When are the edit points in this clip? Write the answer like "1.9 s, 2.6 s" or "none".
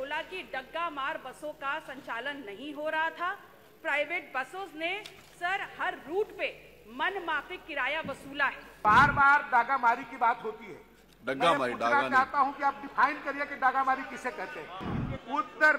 8.8 s, 14.8 s